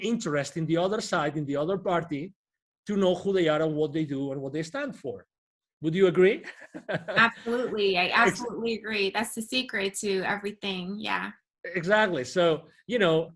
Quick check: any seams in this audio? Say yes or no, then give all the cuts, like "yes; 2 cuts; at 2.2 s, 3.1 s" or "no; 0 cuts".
no; 0 cuts